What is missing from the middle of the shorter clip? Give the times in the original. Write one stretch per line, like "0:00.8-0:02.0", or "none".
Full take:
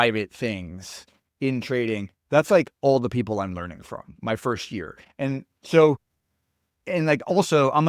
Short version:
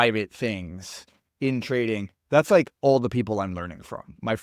none